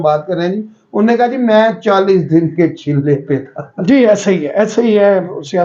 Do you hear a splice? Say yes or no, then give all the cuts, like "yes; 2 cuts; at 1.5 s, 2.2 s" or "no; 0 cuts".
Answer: no; 0 cuts